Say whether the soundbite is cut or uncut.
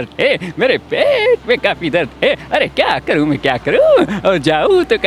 uncut